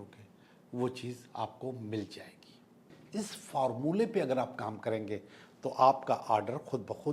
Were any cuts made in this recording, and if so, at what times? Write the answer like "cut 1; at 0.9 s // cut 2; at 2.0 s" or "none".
cut 1; at 3.0 s

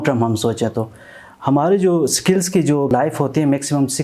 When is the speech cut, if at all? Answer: cut 1; at 2.9 s

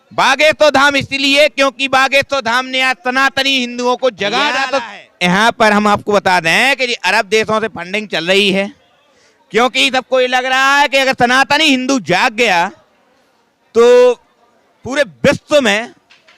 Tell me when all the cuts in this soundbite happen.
cut 1; at 4.6 s

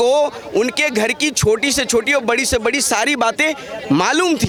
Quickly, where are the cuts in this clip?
none

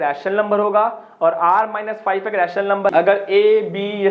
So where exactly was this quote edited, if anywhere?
cut 1; at 2.9 s

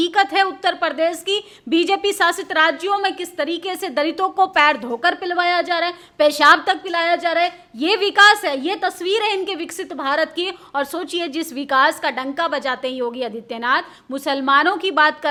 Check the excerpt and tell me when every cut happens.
none

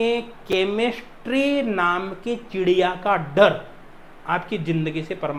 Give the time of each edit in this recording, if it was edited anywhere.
none

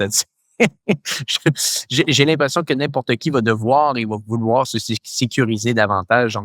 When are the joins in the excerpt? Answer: none

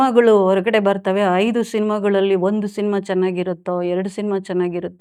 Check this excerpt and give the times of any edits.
none

